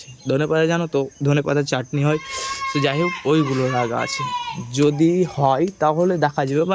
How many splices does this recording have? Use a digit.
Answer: 0